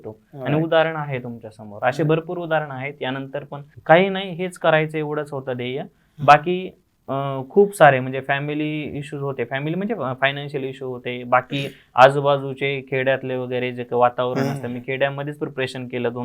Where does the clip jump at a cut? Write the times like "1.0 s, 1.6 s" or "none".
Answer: 3.7 s